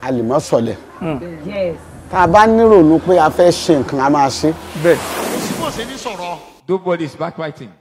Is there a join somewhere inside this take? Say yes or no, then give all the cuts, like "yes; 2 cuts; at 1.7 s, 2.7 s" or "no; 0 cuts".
yes; 1 cut; at 5.2 s